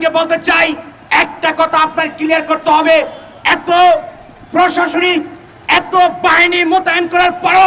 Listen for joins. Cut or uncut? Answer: uncut